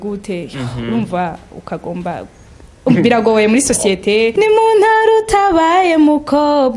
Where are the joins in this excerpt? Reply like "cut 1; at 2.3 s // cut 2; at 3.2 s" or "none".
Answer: cut 1; at 4.3 s